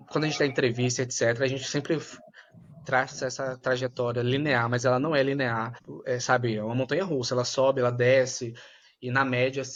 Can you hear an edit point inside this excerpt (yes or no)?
no